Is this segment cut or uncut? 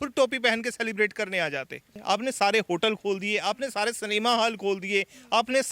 cut